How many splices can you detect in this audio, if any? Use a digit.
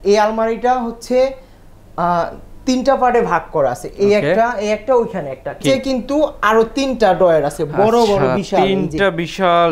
1